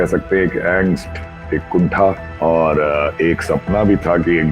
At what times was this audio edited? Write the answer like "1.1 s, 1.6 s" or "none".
2.3 s

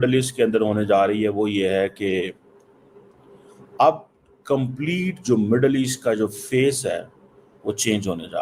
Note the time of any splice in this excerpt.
none

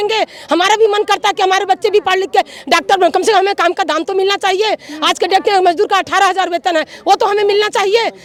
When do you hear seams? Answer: none

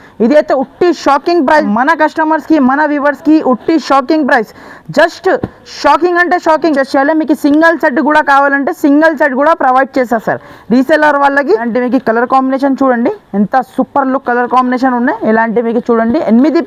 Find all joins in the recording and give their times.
1.7 s, 6.8 s, 11.7 s

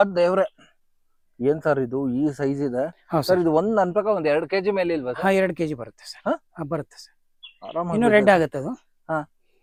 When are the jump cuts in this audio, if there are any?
none

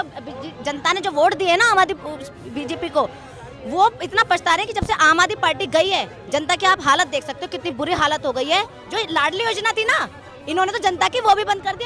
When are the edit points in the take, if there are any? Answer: 8.8 s

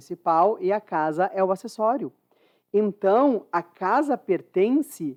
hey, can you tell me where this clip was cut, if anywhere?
none

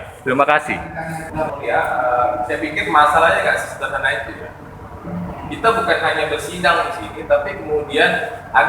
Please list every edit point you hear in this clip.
1.2 s

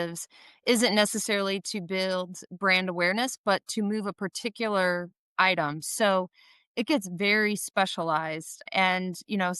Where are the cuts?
8.6 s

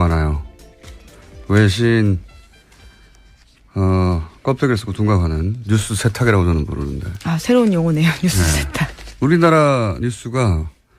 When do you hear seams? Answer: 7.4 s

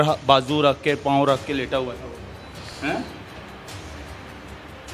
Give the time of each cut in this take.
none

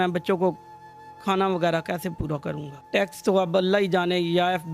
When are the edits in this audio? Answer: 2.7 s

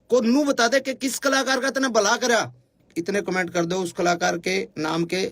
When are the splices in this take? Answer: 2.8 s

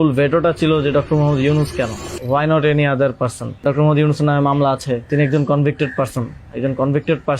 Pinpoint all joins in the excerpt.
2.1 s, 3.6 s, 5.1 s

